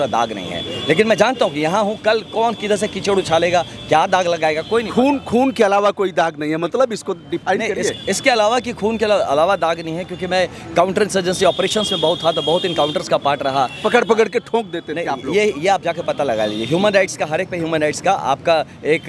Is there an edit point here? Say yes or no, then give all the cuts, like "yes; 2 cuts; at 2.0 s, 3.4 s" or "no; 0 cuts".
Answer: no; 0 cuts